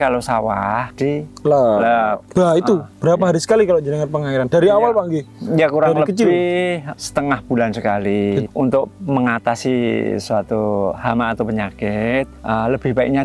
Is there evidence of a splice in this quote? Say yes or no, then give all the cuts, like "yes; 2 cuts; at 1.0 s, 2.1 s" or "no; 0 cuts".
yes; 4 cuts; at 0.9 s, 2.2 s, 6.9 s, 8.4 s